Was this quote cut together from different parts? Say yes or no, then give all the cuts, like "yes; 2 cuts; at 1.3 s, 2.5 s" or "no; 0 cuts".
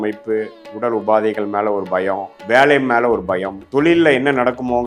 yes; 2 cuts; at 2.3 s, 3.6 s